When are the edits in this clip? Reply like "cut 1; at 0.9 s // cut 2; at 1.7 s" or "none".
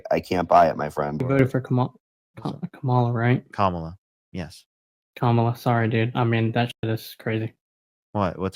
cut 1; at 1.4 s